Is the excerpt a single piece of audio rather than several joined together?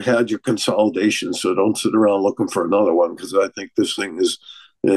yes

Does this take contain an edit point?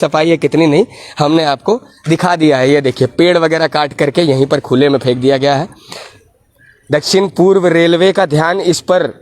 no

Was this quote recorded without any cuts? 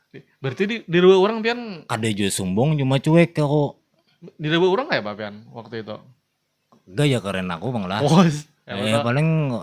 yes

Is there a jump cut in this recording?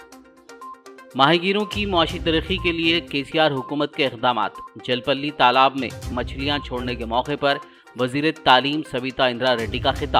no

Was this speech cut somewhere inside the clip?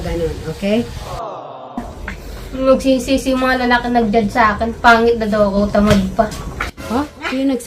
yes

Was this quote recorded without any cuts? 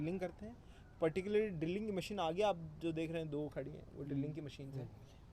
yes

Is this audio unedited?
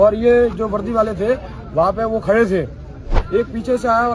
no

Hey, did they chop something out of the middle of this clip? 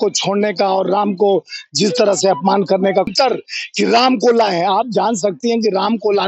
yes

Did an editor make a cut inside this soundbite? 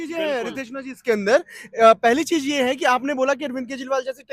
no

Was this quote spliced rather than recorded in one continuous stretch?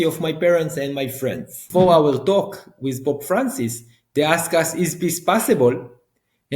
yes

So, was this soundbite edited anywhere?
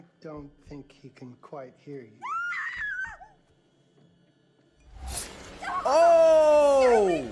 no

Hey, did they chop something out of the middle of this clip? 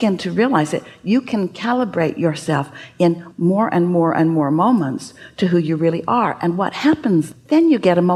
no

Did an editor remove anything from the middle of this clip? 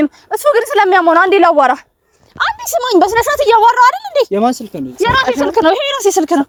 no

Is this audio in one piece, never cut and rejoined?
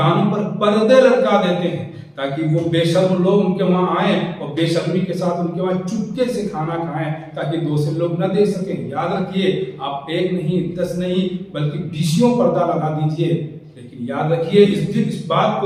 yes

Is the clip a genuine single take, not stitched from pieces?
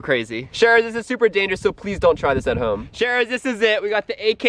no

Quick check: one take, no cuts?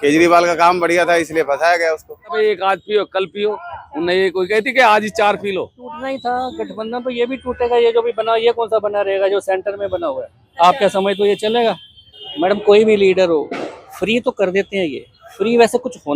no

